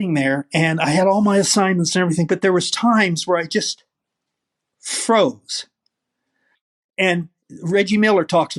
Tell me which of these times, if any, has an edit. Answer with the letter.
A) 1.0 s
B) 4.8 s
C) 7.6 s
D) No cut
D